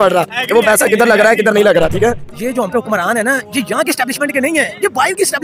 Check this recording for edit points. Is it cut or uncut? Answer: cut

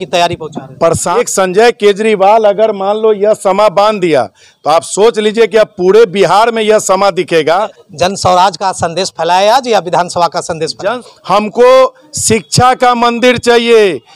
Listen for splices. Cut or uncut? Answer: cut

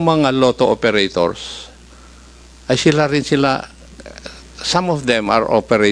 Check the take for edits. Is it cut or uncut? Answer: uncut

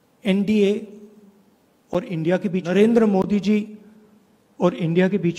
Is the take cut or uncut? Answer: cut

